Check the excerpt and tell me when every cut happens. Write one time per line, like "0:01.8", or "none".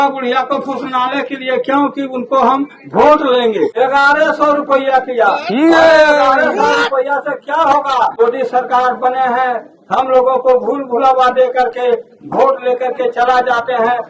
0:03.7
0:08.1